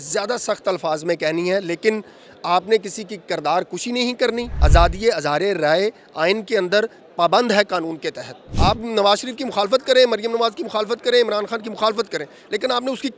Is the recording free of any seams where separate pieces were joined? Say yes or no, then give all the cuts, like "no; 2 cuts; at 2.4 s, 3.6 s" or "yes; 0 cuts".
no; 2 cuts; at 4.5 s, 8.5 s